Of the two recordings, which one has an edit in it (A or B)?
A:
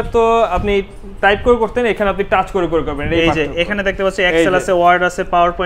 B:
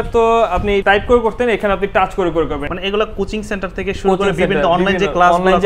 B